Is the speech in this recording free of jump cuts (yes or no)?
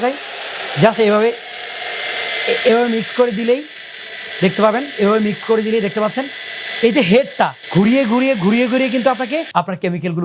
no